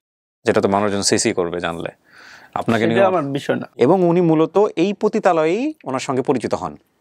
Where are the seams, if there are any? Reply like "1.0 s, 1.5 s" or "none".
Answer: 3.7 s